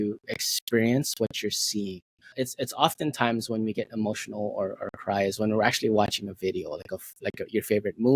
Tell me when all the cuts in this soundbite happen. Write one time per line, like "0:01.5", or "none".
0:02.2